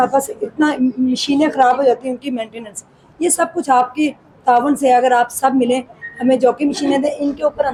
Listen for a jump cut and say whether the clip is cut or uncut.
uncut